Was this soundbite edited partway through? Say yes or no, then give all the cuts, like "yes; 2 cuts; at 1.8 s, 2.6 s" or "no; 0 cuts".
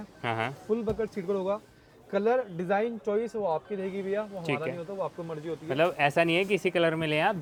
no; 0 cuts